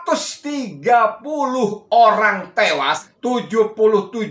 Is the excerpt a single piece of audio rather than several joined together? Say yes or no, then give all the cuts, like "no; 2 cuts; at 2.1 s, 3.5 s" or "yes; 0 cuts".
no; 1 cut; at 3.1 s